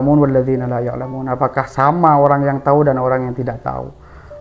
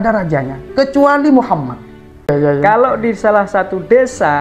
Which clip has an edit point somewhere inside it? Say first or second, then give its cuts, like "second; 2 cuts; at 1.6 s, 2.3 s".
second; 1 cut; at 2.3 s